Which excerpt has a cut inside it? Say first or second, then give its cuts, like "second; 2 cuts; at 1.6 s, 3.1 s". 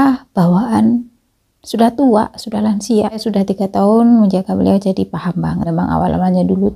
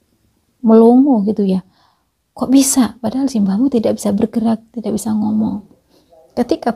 first; 2 cuts; at 3.2 s, 5.7 s